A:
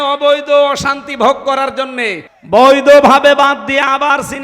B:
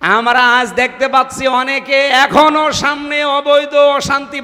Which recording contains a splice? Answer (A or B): A